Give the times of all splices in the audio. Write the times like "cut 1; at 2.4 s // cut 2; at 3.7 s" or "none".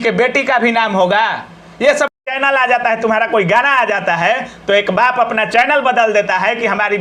cut 1; at 2.1 s